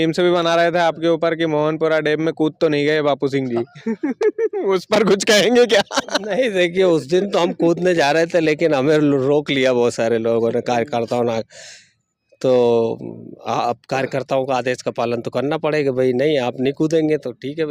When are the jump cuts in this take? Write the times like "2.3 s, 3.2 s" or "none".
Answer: none